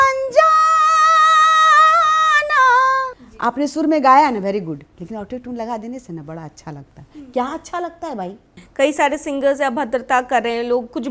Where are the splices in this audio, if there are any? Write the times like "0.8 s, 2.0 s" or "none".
3.2 s, 8.6 s